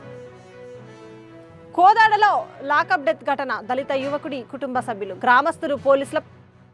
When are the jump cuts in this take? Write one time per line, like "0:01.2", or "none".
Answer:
0:01.0